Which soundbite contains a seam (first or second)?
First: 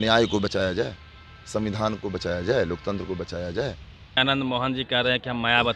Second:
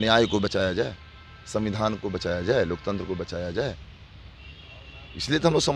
first